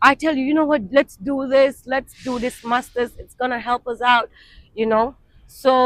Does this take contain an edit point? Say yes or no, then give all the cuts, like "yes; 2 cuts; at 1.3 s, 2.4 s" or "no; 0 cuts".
no; 0 cuts